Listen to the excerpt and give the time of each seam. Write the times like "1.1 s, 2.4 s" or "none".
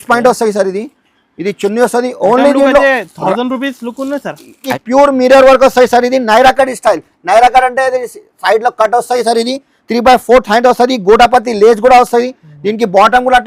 4.8 s